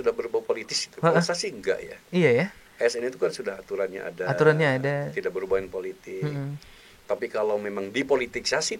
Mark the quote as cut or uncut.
uncut